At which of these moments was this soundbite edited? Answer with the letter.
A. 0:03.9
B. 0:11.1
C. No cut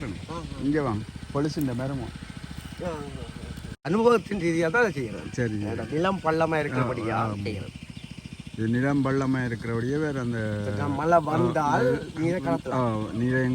A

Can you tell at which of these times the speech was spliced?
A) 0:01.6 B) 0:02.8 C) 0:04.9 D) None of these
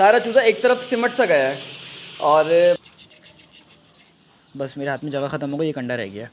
B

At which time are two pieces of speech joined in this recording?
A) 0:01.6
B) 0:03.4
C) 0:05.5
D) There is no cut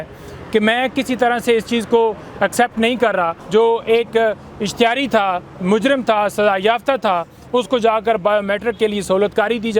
B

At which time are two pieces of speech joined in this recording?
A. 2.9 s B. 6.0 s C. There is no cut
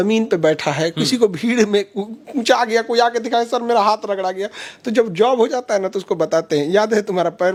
C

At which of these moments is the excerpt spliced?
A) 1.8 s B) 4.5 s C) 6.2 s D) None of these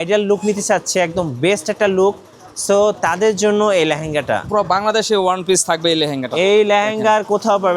B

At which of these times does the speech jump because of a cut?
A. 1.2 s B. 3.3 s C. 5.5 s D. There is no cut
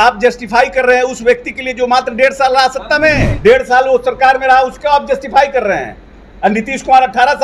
B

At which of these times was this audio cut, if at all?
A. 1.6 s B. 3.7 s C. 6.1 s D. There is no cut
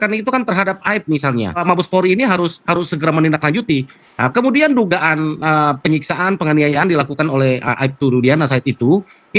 A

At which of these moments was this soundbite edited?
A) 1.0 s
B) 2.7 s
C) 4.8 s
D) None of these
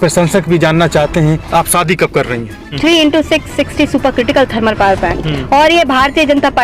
B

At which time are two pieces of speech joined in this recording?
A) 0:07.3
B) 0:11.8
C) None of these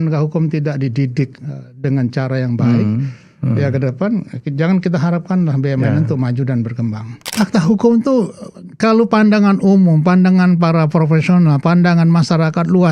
A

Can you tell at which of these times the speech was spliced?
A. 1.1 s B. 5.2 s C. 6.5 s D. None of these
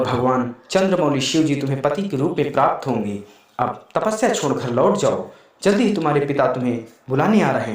D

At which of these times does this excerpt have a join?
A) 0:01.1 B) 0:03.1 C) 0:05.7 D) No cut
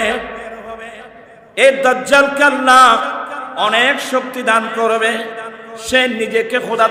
A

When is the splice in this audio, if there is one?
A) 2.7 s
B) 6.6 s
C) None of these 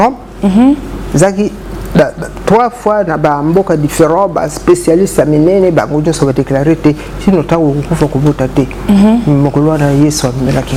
C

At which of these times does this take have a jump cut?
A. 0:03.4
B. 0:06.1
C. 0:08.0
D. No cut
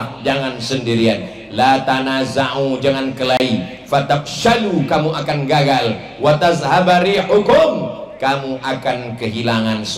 D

